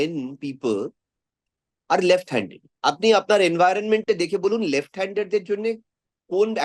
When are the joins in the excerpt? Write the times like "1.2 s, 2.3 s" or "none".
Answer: 2.6 s